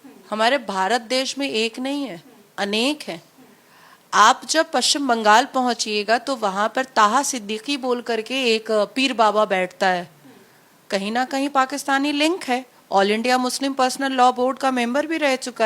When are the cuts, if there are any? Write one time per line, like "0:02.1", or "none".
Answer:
none